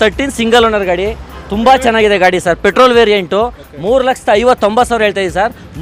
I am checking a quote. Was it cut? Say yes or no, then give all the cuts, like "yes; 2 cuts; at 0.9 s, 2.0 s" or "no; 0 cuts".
no; 0 cuts